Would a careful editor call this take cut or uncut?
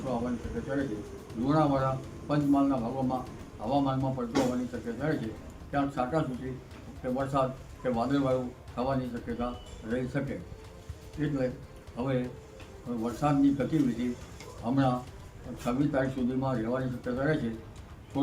uncut